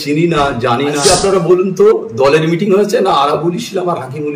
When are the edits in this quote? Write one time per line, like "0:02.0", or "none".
0:01.0